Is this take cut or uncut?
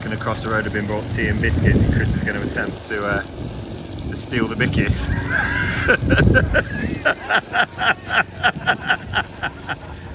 uncut